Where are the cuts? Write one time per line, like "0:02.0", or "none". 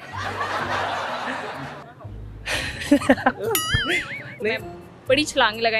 0:04.3